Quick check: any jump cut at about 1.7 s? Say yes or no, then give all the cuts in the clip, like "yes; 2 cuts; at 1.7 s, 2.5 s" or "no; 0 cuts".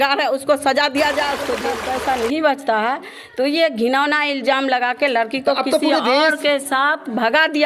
yes; 1 cut; at 1.7 s